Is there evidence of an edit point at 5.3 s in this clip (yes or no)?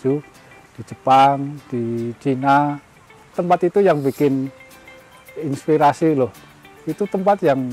no